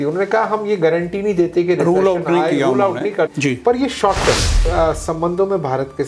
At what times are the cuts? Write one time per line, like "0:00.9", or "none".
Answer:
0:04.7